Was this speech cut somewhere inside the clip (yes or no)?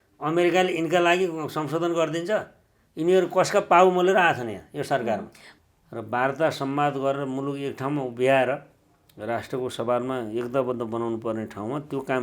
yes